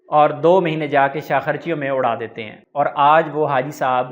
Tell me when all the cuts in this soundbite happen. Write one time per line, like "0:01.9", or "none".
0:02.6